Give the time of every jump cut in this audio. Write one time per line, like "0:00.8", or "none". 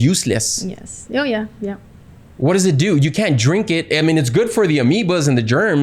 none